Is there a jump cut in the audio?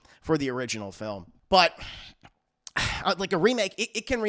yes; 1 cut; at 1.3 s

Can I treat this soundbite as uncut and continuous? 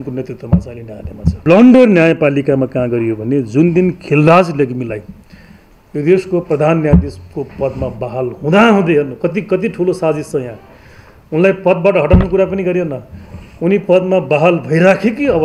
no; 1 cut; at 1.4 s

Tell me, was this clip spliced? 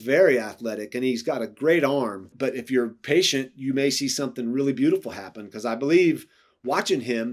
no; 0 cuts

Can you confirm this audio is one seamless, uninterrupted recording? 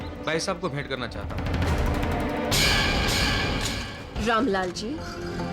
yes; 0 cuts

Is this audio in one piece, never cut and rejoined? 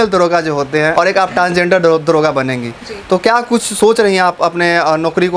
no; 1 cut; at 0.9 s

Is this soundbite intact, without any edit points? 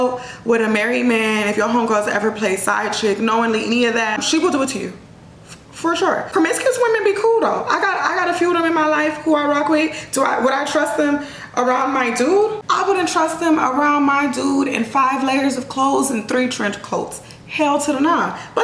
no; 3 cuts; at 4.2 s, 6.3 s, 12.6 s

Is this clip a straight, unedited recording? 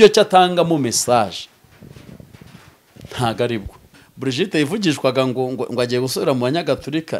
no; 1 cut; at 4.0 s

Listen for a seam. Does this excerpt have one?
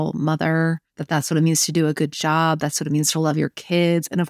yes; 1 cut; at 0.9 s

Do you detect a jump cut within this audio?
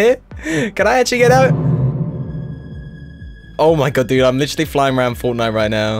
yes; 1 cut; at 1.5 s

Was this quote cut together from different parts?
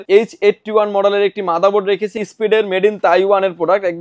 yes; 1 cut; at 2.1 s

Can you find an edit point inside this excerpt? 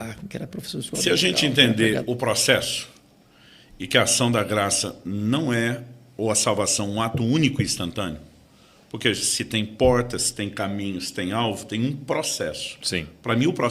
yes; 1 cut; at 0.9 s

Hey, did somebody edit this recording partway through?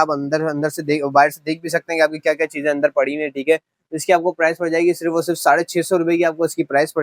no; 0 cuts

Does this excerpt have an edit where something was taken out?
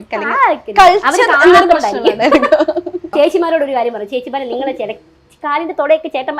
yes; 1 cut; at 3.1 s

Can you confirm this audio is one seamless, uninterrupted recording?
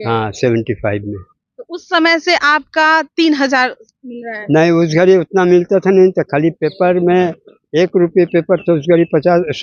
yes; 0 cuts

